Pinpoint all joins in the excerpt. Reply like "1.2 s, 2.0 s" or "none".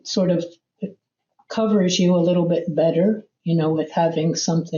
none